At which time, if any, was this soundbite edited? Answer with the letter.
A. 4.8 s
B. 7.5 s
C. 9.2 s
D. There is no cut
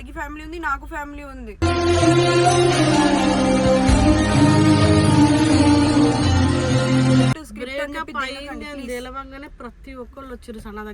B